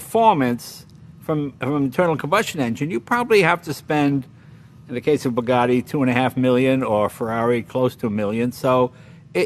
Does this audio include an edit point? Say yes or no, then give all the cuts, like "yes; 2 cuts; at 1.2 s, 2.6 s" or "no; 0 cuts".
no; 0 cuts